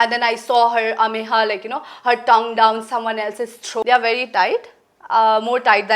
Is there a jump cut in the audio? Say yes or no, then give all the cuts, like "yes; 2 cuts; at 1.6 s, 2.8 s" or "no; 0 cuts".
yes; 1 cut; at 3.8 s